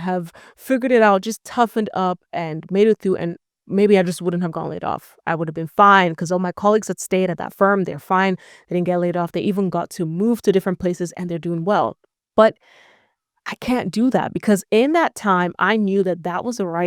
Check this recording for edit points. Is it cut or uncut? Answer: uncut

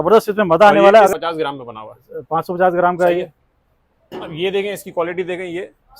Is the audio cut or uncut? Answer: cut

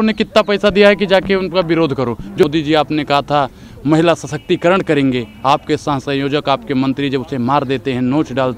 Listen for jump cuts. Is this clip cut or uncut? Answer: cut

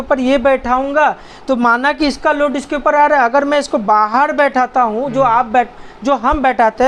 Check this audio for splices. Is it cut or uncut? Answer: uncut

